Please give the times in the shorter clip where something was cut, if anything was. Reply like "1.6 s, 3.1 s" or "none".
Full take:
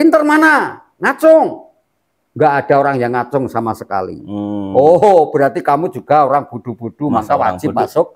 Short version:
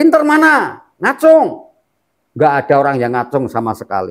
none